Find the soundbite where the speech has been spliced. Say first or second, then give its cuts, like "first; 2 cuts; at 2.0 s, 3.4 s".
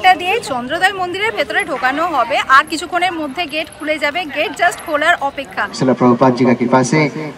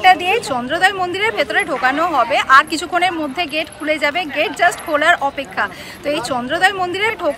first; 1 cut; at 5.6 s